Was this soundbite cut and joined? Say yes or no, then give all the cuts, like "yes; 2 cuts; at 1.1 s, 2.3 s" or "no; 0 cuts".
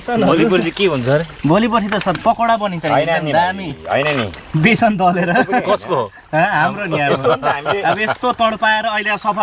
no; 0 cuts